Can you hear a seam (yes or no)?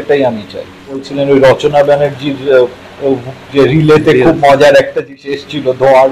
yes